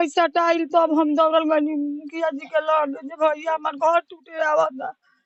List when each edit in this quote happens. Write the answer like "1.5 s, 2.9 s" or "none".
none